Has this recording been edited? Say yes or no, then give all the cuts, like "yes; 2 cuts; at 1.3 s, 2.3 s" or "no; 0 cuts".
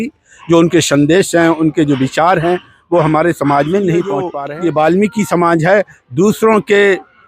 yes; 1 cut; at 4.3 s